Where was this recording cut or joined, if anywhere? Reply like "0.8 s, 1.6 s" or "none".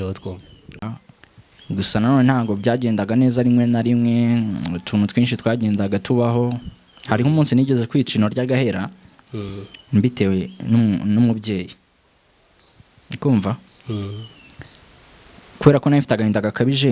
1.1 s